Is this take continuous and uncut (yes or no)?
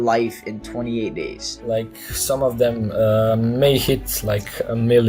no